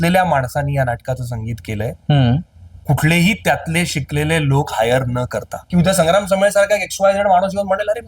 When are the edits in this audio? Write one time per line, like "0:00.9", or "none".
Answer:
0:05.6